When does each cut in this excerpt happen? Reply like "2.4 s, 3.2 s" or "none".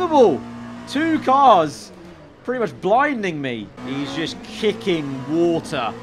3.8 s